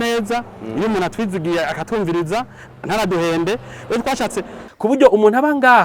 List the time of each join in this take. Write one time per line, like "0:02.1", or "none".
0:04.6